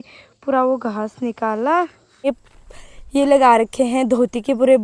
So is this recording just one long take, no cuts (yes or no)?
no